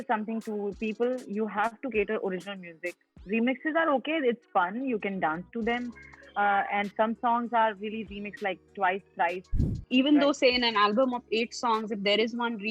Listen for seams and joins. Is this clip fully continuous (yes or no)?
no